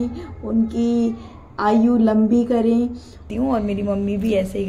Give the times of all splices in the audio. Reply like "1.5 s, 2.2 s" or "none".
3.2 s